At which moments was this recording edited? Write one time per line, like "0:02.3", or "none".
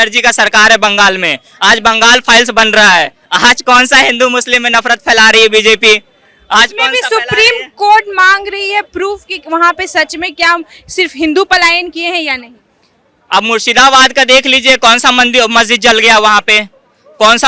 none